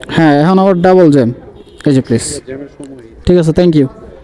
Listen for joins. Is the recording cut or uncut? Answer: uncut